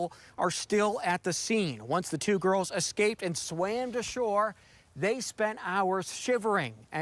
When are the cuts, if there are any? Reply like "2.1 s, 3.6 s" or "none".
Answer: none

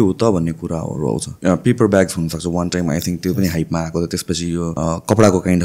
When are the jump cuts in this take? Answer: 1.3 s, 4.7 s

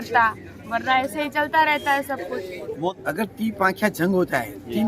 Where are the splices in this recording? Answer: 2.9 s

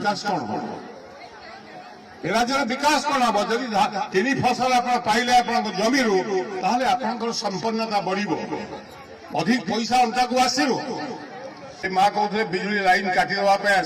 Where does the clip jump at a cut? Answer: 11.9 s

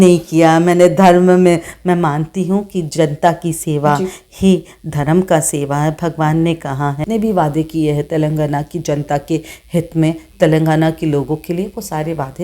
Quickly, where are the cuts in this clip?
7.0 s

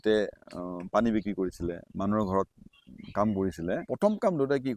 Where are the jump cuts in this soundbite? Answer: 3.8 s

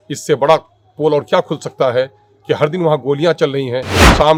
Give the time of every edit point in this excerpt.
none

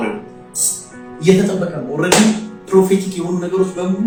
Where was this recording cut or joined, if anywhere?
none

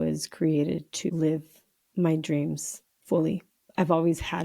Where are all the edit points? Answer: 1.1 s

